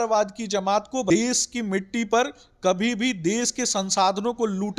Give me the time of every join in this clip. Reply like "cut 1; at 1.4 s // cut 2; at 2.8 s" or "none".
cut 1; at 1.1 s

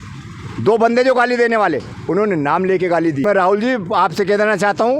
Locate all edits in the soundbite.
cut 1; at 3.2 s

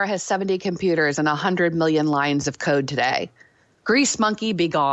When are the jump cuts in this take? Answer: none

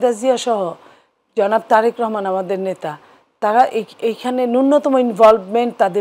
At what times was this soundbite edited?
none

